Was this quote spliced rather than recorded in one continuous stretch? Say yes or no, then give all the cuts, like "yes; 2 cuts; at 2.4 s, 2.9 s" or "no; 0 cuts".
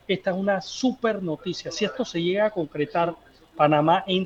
no; 0 cuts